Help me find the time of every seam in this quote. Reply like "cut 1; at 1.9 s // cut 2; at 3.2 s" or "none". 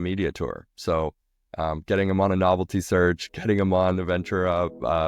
none